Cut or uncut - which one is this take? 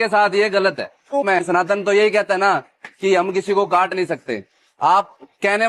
uncut